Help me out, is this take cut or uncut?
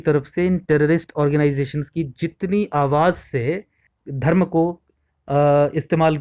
cut